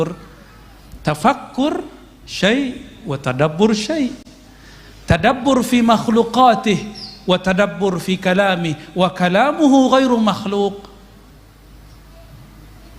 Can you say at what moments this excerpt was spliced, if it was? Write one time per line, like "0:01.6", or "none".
none